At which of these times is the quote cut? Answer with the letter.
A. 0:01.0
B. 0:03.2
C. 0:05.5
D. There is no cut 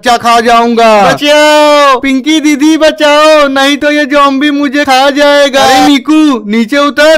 A